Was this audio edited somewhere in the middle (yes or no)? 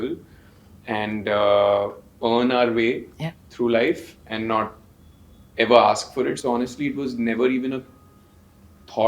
no